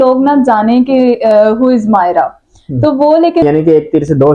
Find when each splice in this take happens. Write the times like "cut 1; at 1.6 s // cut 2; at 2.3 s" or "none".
cut 1; at 3.4 s